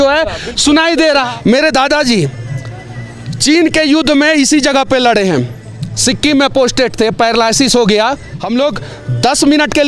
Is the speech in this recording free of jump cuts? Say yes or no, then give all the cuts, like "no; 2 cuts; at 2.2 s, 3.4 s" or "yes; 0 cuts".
no; 2 cuts; at 1.3 s, 8.3 s